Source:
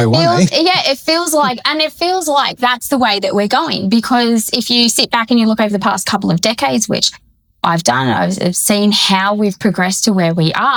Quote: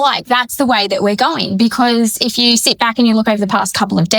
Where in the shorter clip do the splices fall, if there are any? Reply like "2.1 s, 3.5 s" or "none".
none